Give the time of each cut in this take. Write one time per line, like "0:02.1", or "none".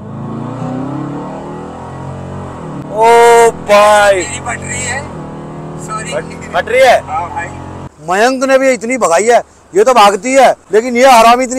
0:02.8
0:07.9
0:10.6